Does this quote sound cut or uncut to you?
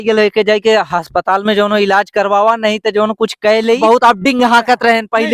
cut